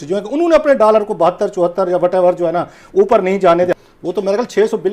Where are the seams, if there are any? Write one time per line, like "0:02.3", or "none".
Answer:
0:03.8